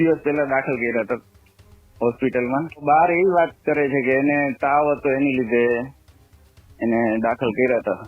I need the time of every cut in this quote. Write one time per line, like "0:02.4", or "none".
0:02.8